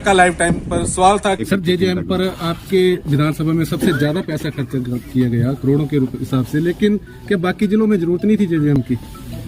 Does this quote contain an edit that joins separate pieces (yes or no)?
no